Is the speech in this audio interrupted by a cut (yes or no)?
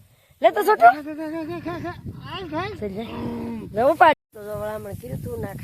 yes